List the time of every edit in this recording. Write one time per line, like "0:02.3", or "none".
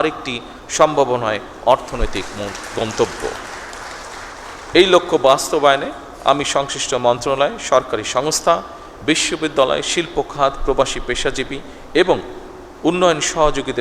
none